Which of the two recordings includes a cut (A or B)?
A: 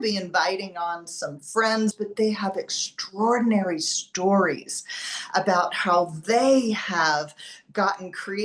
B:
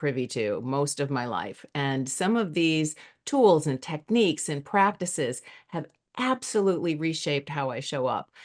A